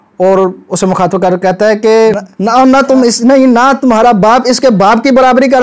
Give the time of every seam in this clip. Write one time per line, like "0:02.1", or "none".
0:02.3